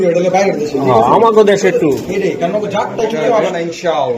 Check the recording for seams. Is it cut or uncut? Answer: cut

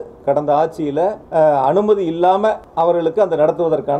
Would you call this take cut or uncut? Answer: cut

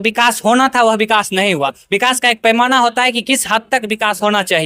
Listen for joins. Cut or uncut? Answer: uncut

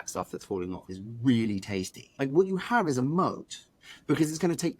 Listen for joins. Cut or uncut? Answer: cut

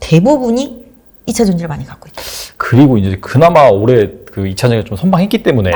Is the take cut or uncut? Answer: uncut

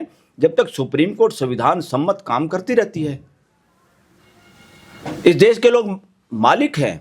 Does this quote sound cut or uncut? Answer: uncut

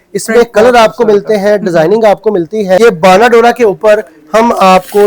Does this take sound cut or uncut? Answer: cut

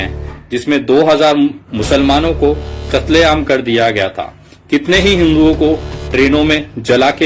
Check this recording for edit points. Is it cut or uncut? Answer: uncut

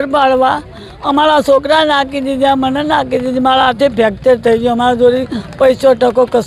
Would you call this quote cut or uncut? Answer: uncut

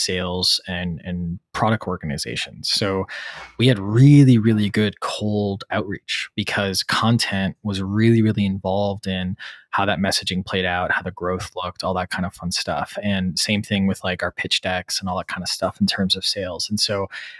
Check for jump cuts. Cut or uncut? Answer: uncut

